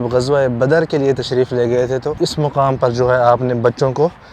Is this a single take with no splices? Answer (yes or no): no